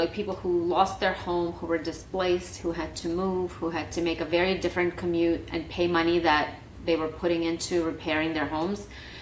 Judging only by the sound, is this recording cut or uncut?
uncut